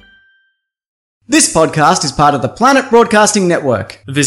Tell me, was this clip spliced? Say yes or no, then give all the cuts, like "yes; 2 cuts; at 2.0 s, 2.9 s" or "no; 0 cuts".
yes; 1 cut; at 1.1 s